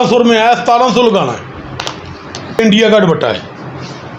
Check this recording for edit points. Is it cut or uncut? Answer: cut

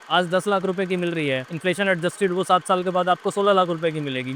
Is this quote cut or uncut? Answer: cut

